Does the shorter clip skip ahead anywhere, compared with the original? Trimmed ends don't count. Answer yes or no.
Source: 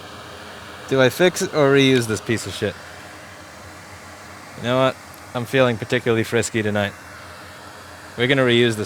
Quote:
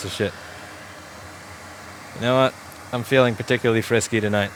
no